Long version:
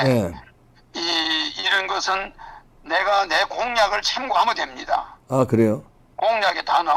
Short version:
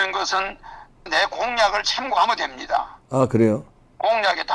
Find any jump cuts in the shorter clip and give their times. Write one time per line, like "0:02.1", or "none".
0:01.1